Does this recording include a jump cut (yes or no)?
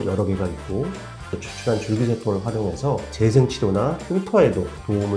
yes